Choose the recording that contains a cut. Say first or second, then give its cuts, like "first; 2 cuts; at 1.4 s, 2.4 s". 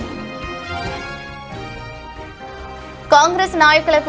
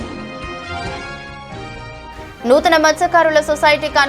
first; 1 cut; at 2.1 s